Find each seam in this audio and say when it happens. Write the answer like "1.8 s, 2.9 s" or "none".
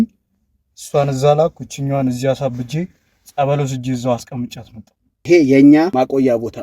5.2 s, 5.9 s